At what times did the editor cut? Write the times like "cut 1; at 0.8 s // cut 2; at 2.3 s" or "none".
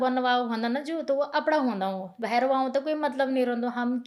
cut 1; at 2.2 s